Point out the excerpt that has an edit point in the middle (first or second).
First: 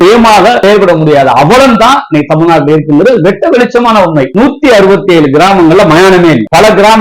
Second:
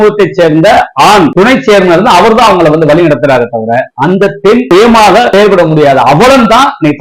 first